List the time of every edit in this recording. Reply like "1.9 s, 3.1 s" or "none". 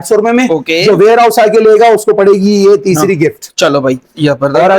none